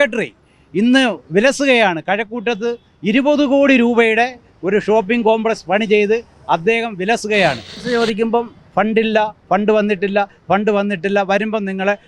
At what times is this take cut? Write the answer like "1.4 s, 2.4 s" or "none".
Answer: 7.7 s